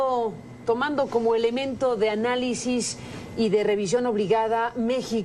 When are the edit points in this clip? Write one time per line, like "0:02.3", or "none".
0:03.1